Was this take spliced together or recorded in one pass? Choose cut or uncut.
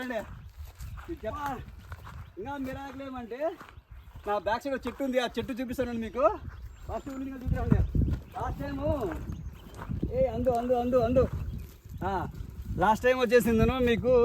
cut